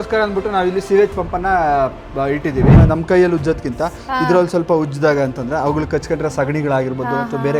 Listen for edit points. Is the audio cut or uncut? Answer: cut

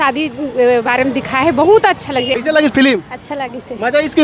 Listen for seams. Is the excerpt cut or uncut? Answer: cut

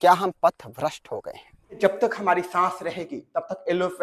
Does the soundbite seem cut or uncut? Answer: cut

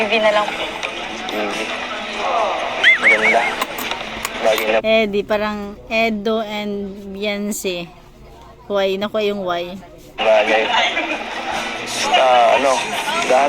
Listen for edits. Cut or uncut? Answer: cut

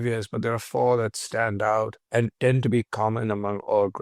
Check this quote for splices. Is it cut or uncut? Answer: cut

